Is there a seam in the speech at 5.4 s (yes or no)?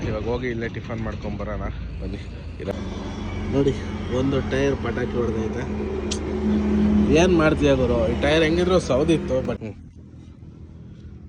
no